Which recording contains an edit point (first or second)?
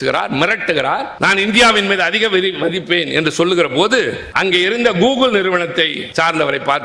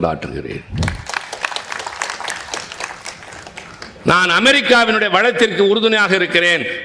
first